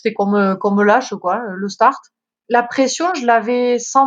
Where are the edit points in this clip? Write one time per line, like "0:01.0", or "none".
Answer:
0:02.3